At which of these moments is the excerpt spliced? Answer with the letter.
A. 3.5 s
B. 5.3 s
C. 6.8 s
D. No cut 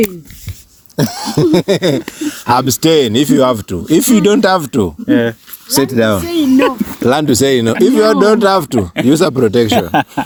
D